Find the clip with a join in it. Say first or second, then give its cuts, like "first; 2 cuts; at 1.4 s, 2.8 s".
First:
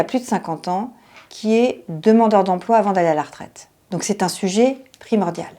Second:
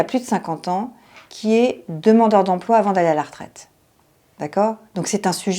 first; 1 cut; at 3.9 s